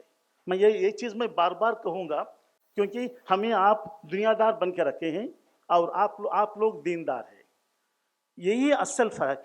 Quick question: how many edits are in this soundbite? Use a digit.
1